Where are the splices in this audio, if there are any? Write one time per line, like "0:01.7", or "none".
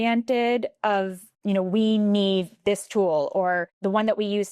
0:01.3
0:03.7